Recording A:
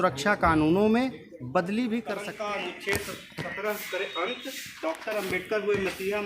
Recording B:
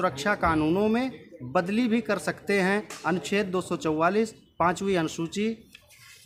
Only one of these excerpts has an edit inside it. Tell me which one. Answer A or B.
A